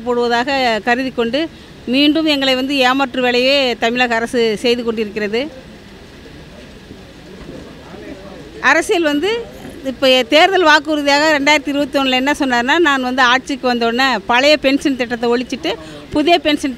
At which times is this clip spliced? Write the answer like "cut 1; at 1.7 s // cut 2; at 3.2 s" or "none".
none